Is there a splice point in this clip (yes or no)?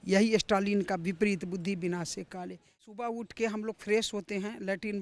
yes